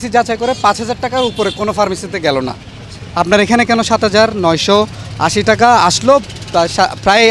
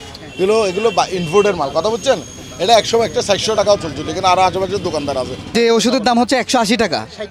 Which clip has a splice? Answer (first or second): second